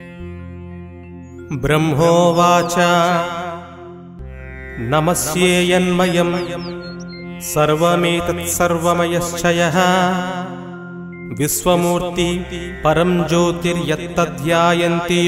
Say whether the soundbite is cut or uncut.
cut